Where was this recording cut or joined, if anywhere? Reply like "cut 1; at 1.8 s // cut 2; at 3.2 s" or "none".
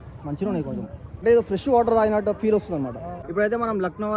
cut 1; at 1.0 s // cut 2; at 3.1 s